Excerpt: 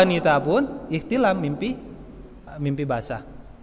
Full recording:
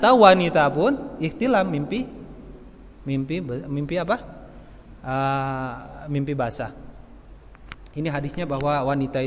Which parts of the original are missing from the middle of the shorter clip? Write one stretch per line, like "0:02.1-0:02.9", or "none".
0:02.7-0:05.9